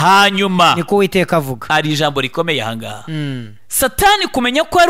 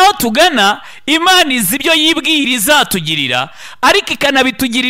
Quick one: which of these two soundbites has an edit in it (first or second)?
first